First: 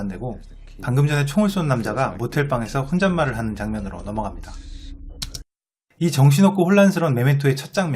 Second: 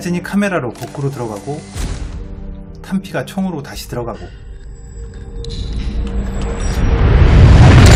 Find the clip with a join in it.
first; 1 cut; at 3.6 s

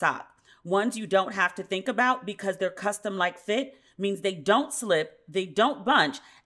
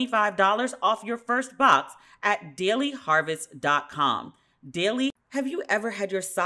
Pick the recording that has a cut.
second; 1 cut; at 5.2 s

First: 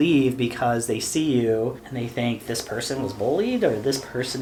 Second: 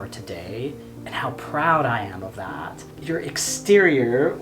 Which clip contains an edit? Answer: second; 2 cuts; at 0.9 s, 2.9 s

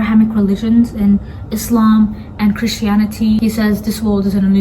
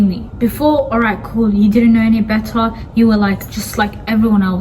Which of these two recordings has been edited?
first; 1 cut; at 3.4 s

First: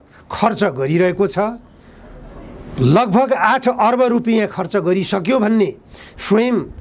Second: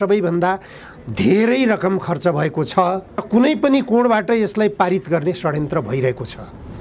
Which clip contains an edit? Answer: second; 1 cut; at 3.2 s

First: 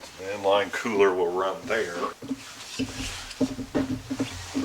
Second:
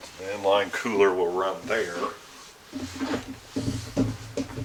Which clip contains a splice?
first; 1 cut; at 2.2 s

